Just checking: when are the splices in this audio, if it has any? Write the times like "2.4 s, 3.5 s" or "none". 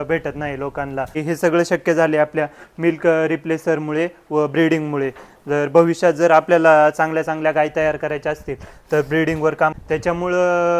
1.2 s, 9.8 s